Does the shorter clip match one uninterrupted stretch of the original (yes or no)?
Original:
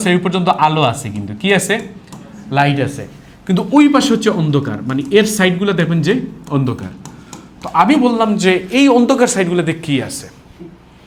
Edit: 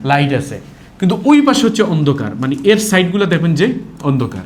yes